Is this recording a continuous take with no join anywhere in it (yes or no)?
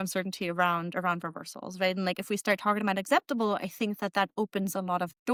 yes